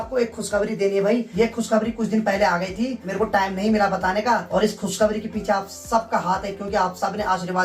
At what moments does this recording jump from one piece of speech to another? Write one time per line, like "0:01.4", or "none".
none